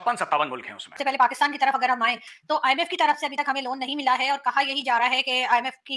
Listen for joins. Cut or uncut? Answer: cut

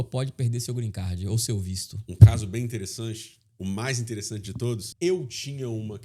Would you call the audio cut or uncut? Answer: cut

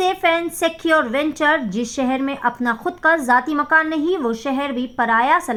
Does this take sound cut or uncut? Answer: uncut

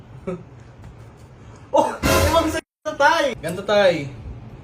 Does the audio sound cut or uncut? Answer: cut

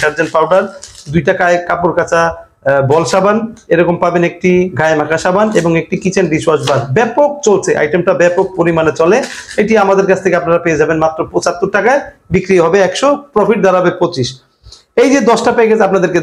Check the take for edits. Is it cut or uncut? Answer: uncut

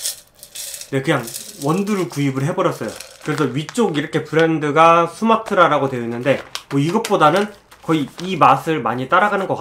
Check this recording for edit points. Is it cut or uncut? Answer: cut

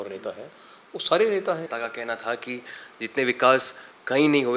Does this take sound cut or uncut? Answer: cut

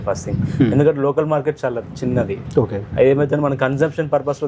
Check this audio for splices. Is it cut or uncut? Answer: uncut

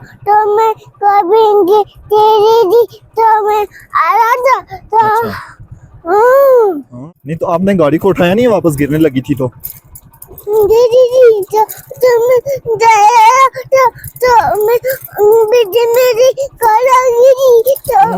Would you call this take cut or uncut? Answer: cut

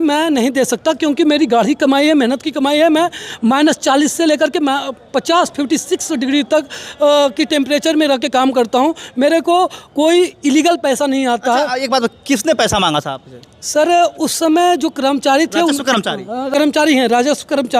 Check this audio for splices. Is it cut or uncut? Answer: cut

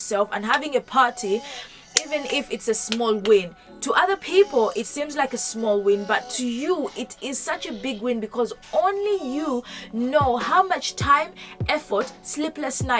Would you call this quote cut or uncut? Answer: uncut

